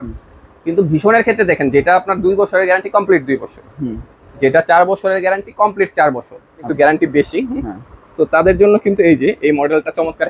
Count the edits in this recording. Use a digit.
1